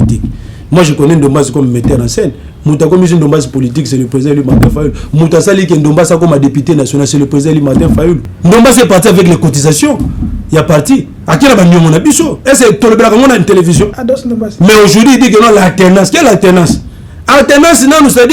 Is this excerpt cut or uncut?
cut